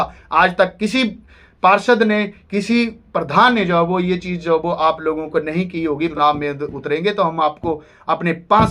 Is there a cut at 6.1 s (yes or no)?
yes